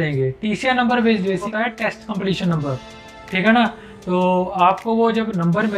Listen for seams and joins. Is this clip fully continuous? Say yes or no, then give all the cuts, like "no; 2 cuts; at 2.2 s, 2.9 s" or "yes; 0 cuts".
no; 1 cut; at 1.5 s